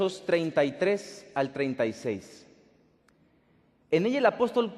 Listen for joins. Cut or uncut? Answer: cut